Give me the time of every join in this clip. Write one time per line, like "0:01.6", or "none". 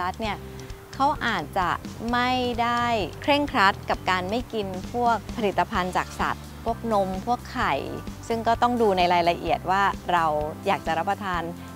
0:03.1
0:05.3
0:08.1